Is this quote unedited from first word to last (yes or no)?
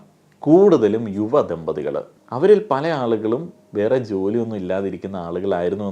no